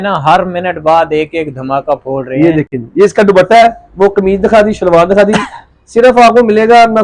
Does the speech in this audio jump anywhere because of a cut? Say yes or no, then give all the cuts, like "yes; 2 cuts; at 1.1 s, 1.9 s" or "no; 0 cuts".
no; 0 cuts